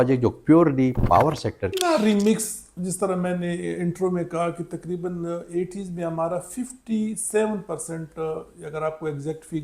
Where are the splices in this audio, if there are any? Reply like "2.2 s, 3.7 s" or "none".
1.7 s

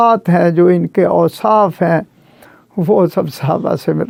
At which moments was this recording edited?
none

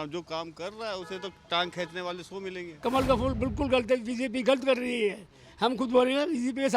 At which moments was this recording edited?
2.7 s

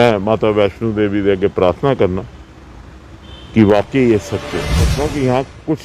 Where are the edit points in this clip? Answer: 4.9 s

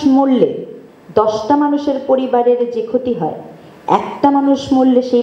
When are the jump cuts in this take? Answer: none

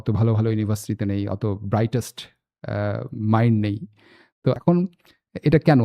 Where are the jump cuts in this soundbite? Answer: 4.6 s

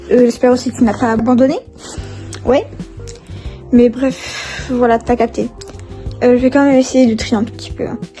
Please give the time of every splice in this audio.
1.2 s

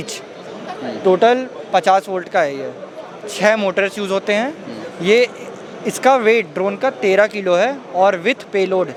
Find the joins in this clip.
none

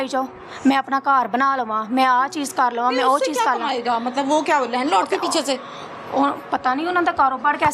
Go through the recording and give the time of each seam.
none

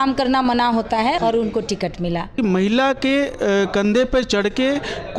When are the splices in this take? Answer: 1.2 s, 2.4 s

